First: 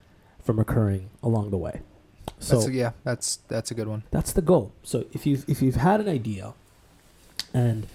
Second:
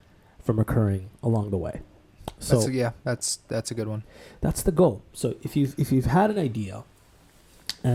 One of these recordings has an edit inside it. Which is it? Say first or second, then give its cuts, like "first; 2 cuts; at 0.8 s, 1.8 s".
first; 1 cut; at 4.0 s